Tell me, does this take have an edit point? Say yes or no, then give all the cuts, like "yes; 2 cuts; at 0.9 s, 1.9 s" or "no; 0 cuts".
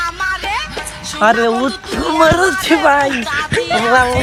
no; 0 cuts